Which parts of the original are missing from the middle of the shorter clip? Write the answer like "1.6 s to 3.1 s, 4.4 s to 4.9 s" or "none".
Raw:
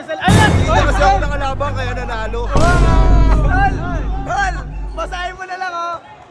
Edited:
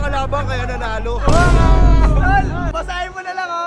4.0 s to 4.9 s